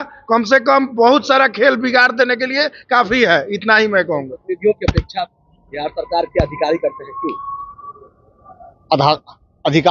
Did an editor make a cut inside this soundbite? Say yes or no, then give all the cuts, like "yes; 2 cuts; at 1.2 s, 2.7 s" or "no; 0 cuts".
no; 0 cuts